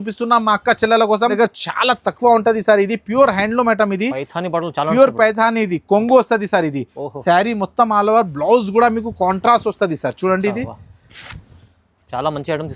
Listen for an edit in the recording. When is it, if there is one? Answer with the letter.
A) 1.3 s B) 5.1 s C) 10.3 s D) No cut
A